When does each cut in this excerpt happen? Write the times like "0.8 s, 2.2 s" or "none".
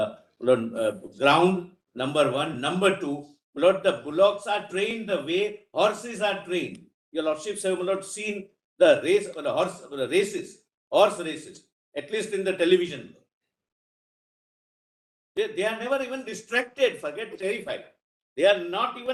none